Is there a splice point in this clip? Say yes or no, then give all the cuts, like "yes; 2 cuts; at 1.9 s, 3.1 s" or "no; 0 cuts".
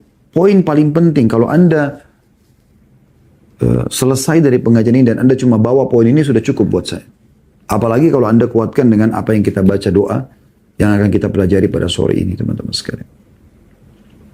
no; 0 cuts